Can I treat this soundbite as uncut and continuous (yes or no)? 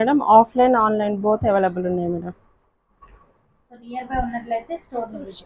no